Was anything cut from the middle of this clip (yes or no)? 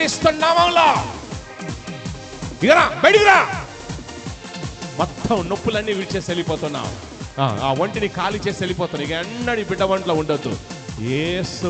no